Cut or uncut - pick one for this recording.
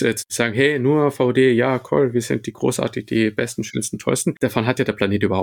cut